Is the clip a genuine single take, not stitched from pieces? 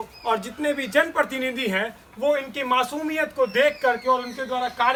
yes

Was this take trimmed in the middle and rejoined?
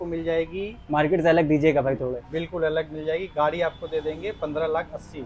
no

